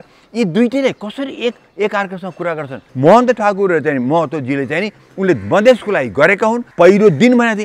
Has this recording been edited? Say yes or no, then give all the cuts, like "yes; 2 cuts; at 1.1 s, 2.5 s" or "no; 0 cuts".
yes; 2 cuts; at 2.9 s, 6.7 s